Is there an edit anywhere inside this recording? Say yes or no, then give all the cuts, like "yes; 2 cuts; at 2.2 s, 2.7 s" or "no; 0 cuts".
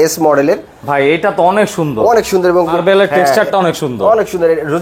yes; 1 cut; at 2.8 s